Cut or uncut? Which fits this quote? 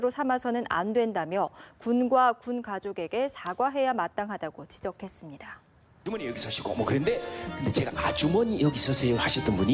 uncut